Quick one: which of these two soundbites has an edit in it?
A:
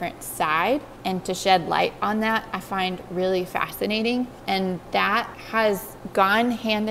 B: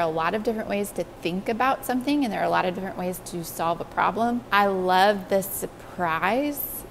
B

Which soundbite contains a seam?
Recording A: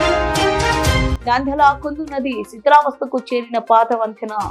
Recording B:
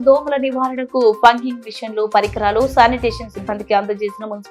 A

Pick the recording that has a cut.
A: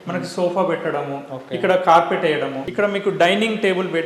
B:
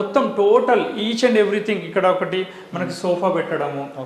A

